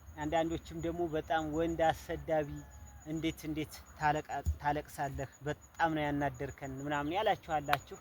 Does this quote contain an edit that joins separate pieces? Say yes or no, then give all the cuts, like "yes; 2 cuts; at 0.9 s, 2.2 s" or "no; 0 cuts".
no; 0 cuts